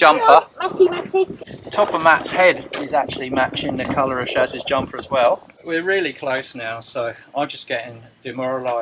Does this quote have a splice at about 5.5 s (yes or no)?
yes